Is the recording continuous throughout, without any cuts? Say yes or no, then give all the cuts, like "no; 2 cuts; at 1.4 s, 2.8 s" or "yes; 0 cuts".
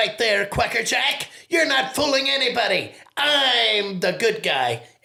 yes; 0 cuts